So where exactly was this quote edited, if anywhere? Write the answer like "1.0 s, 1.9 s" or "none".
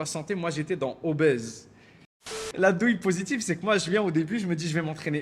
2.3 s